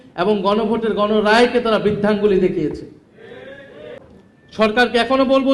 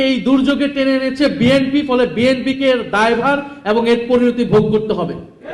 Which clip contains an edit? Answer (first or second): first